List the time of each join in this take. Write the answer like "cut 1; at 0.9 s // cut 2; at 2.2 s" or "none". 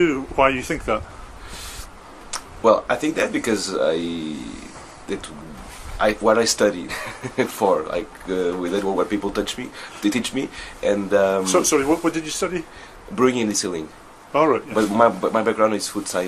none